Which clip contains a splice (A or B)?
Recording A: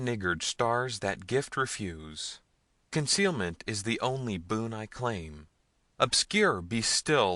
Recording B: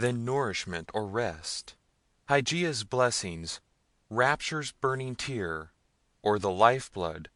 A